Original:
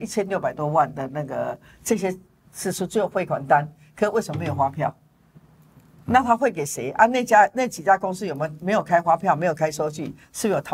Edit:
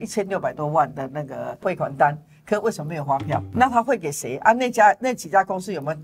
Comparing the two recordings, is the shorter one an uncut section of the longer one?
no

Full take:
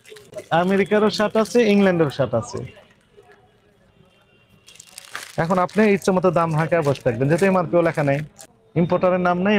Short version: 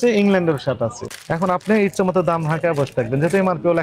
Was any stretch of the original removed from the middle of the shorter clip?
yes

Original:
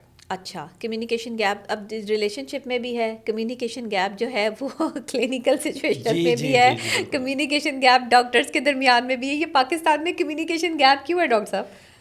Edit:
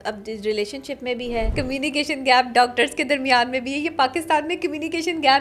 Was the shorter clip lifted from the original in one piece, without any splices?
no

